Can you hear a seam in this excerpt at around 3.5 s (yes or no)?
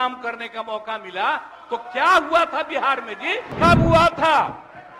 yes